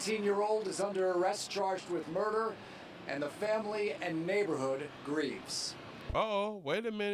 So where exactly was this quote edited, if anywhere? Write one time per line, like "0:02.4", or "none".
none

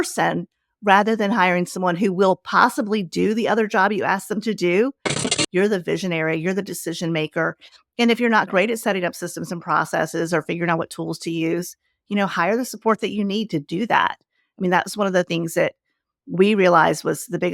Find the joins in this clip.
0:05.3

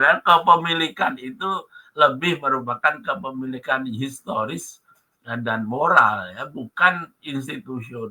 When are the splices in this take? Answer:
none

